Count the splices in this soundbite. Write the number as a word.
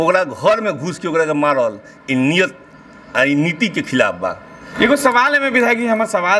one